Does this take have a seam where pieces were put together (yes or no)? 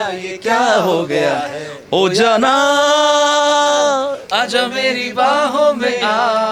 no